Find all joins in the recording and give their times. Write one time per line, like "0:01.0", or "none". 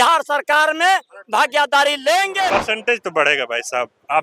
0:02.5